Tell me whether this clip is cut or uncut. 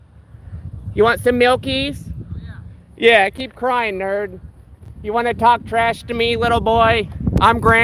uncut